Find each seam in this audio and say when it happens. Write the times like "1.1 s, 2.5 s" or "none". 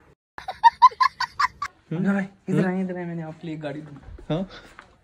1.6 s